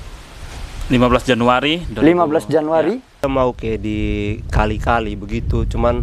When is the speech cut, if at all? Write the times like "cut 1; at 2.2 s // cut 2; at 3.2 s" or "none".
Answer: cut 1; at 3.2 s